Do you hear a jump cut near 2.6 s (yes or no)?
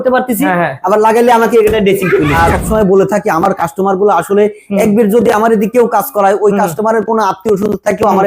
yes